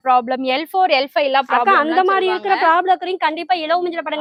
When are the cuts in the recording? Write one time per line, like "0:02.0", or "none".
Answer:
none